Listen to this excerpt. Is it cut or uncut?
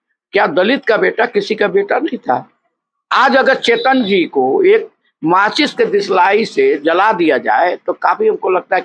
uncut